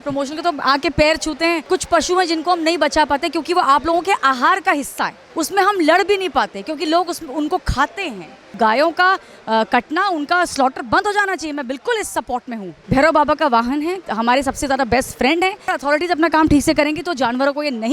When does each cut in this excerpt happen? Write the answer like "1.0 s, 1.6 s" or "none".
1.6 s, 5.2 s, 8.5 s, 12.8 s, 14.0 s, 15.7 s

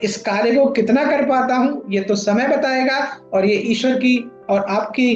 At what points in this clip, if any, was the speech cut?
none

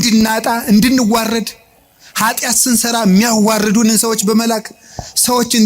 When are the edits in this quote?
none

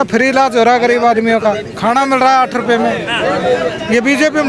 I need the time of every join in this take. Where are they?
none

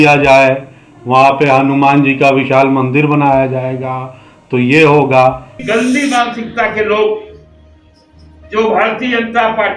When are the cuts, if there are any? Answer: 5.5 s

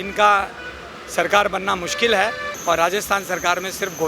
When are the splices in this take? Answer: 2.5 s

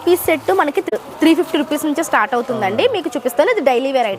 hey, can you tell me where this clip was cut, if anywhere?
none

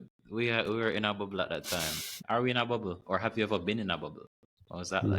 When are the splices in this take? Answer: 2.1 s

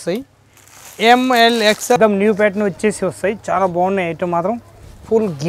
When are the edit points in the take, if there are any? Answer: 2.0 s

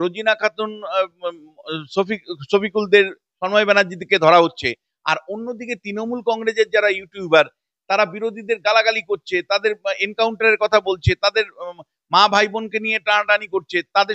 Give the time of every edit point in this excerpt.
none

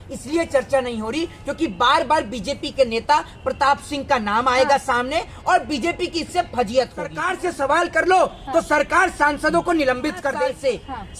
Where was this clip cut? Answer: 7.2 s, 10.4 s

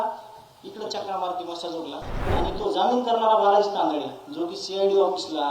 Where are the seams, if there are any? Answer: 2.3 s

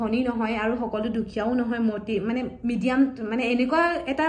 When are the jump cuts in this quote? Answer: none

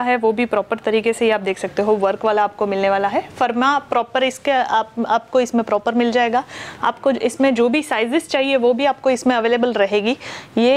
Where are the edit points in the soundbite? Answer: none

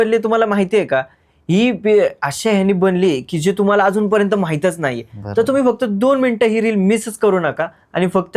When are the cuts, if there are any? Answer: none

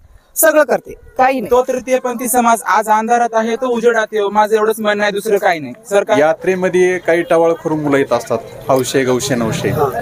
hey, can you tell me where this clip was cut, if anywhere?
1.4 s, 6.2 s

